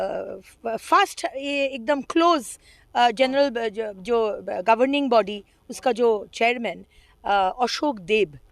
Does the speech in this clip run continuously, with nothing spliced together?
yes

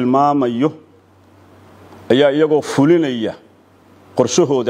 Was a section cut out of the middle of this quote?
no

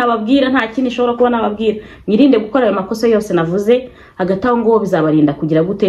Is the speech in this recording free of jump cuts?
yes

